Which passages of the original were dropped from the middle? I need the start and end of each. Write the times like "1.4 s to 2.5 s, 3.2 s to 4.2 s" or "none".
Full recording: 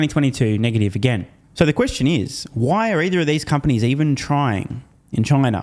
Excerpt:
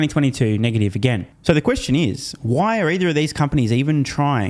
1.3 s to 1.4 s